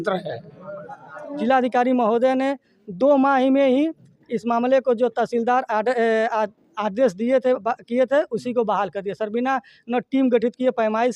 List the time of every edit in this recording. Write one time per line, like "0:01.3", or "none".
0:01.3